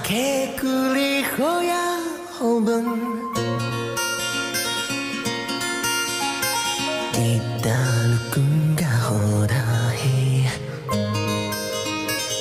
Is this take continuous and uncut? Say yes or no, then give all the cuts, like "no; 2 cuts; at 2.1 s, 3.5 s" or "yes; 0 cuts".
yes; 0 cuts